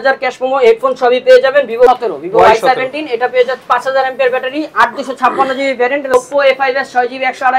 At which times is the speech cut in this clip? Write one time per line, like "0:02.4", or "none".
0:01.9
0:06.1